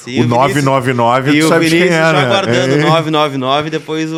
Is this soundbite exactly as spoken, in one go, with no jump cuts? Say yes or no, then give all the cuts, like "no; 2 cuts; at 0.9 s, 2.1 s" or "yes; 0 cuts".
yes; 0 cuts